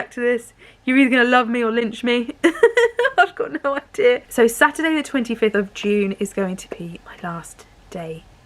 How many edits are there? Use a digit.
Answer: 1